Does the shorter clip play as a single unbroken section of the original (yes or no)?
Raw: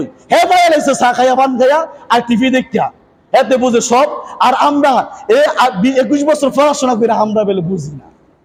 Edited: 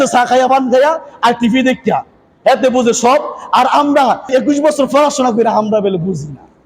no